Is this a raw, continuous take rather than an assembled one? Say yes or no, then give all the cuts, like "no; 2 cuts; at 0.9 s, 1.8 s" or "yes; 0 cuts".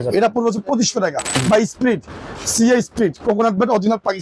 no; 1 cut; at 1.4 s